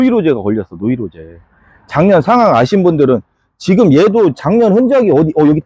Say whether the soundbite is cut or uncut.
uncut